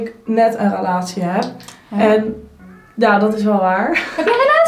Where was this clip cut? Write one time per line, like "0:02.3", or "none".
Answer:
none